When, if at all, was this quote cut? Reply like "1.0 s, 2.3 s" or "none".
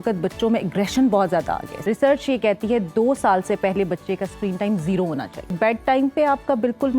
1.7 s, 5.5 s